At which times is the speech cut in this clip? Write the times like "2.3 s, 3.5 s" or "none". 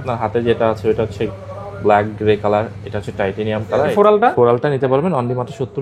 3.9 s